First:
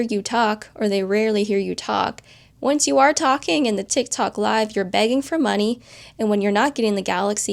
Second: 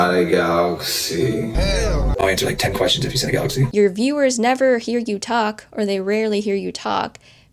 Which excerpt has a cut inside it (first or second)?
second